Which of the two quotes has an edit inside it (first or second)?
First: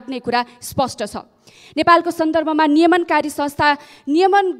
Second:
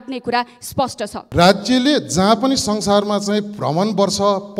second